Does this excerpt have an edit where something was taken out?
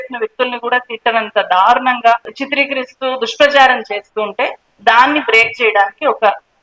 no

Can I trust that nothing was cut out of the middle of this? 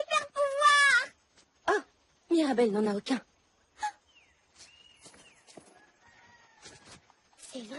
yes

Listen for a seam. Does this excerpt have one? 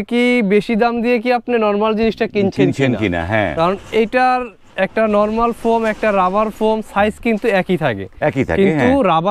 no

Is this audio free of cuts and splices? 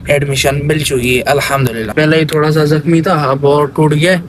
no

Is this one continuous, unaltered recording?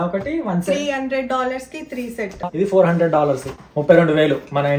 no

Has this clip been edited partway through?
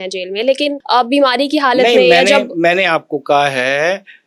no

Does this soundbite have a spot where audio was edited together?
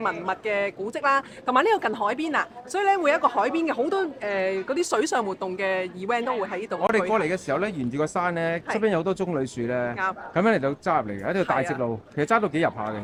no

